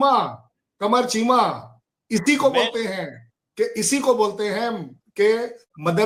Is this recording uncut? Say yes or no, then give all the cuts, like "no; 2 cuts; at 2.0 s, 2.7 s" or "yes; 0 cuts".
yes; 0 cuts